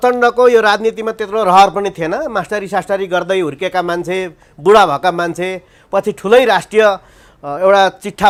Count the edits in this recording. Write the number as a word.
zero